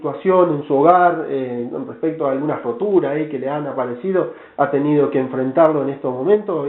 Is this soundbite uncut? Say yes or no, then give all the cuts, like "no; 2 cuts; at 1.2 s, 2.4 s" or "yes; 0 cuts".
no; 1 cut; at 4.0 s